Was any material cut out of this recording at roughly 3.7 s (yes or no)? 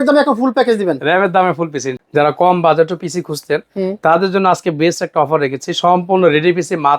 no